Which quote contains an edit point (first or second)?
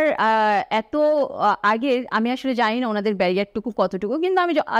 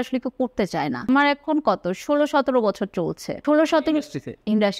second